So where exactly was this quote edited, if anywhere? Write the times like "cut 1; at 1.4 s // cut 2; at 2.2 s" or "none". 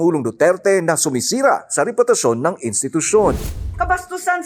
cut 1; at 3.4 s